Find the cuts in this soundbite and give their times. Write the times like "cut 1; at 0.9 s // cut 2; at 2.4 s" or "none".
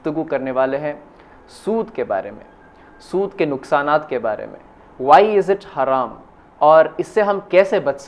none